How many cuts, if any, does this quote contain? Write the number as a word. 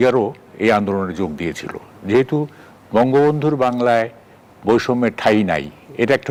zero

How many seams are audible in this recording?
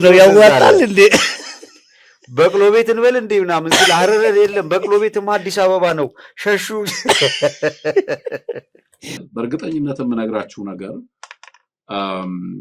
one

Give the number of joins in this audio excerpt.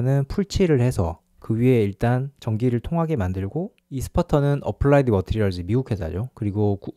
one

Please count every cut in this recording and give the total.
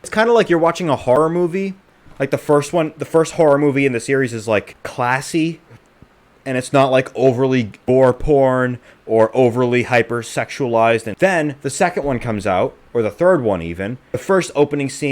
five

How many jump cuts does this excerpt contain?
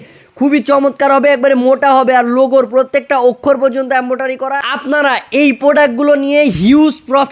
one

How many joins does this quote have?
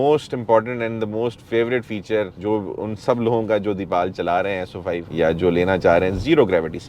zero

